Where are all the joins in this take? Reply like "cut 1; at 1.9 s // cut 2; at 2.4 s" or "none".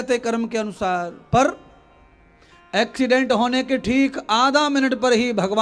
none

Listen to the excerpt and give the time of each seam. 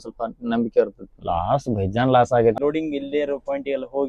cut 1; at 1.2 s // cut 2; at 2.6 s

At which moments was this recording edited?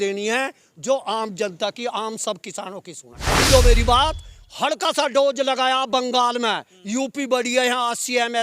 cut 1; at 3.4 s

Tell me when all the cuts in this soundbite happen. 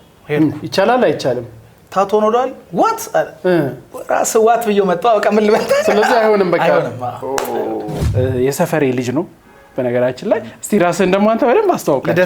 cut 1; at 8.0 s

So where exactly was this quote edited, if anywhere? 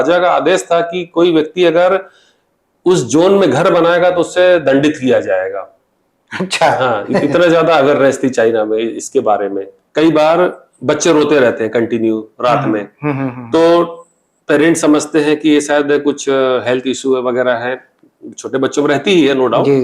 cut 1; at 9.7 s

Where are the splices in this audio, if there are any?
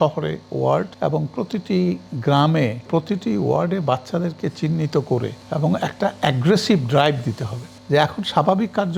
cut 1; at 0.9 s // cut 2; at 2.8 s // cut 3; at 5.4 s // cut 4; at 7.7 s

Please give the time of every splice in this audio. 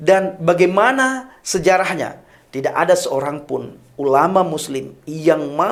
none

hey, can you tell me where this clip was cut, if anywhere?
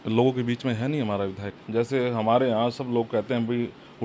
cut 1; at 1.5 s

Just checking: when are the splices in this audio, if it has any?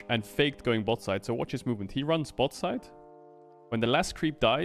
none

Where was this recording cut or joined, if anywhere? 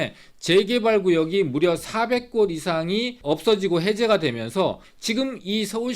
cut 1; at 3.1 s // cut 2; at 4.9 s

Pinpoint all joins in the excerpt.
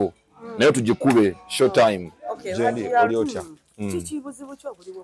cut 1; at 3.1 s

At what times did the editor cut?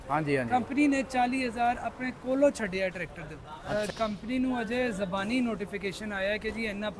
cut 1; at 3.7 s

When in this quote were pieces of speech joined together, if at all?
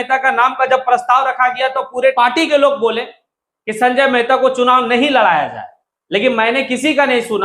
cut 1; at 2.1 s

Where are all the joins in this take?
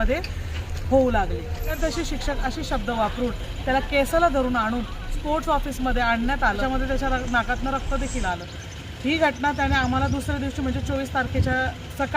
cut 1; at 1.8 s // cut 2; at 6.6 s

